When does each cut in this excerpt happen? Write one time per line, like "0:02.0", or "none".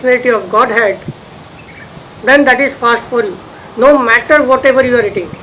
none